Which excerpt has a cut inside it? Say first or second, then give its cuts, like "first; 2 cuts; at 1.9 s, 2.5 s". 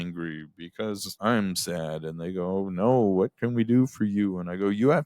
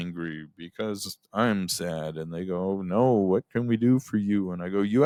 first; 1 cut; at 1.1 s